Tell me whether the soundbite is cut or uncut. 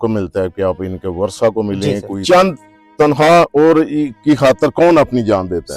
cut